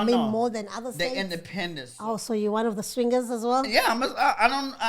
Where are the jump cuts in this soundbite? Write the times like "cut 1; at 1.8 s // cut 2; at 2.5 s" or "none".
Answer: cut 1; at 1.9 s